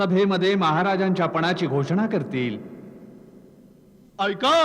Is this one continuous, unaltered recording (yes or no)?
yes